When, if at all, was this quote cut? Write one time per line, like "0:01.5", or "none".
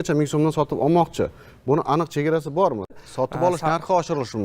0:01.1
0:02.9